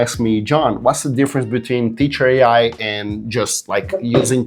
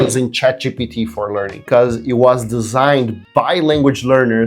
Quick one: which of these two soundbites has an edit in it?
second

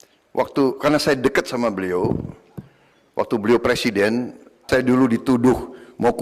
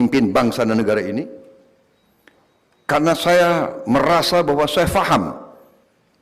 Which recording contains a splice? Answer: first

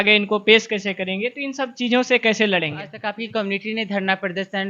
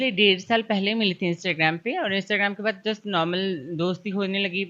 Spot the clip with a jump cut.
first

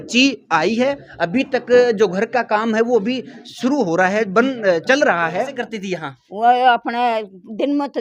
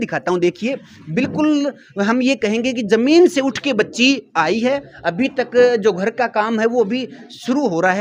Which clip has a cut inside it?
first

